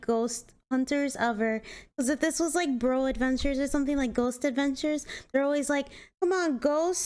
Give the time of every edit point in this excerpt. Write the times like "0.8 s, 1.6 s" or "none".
6.0 s